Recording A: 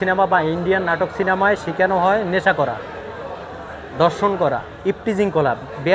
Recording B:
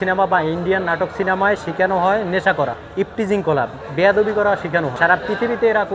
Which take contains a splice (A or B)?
B